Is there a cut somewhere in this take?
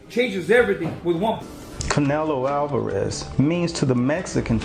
yes; 1 cut; at 1.4 s

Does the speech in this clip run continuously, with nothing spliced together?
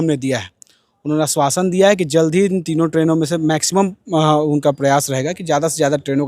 yes; 0 cuts

